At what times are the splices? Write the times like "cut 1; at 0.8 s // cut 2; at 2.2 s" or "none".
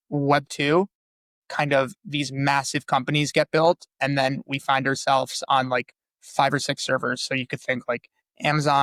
none